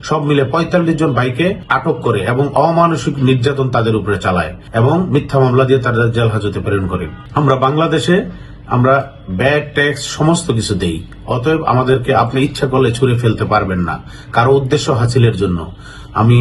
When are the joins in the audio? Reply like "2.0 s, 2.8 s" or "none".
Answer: 1.6 s, 4.6 s, 7.2 s